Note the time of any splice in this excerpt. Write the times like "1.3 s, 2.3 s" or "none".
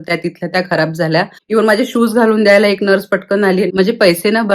1.4 s, 3.7 s